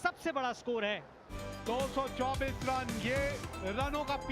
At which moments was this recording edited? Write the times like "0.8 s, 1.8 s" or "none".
1.2 s